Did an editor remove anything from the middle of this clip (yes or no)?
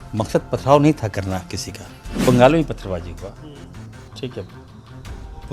yes